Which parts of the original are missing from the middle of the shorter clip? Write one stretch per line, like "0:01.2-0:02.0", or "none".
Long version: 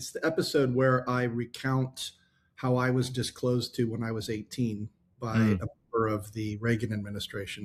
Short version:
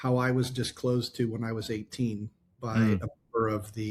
none